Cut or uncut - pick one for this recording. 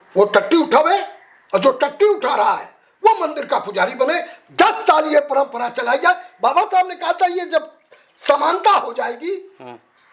uncut